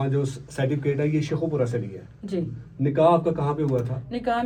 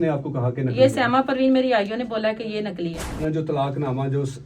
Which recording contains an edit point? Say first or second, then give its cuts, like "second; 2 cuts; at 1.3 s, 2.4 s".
second; 1 cut; at 3.1 s